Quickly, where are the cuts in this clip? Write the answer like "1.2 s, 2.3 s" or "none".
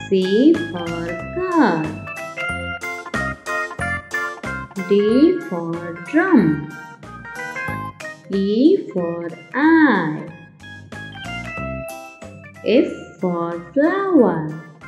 none